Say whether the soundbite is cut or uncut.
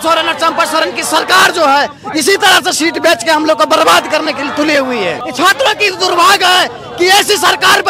cut